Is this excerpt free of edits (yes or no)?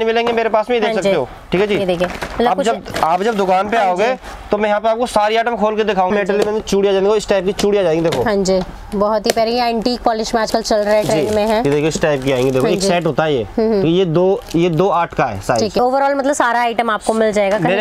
no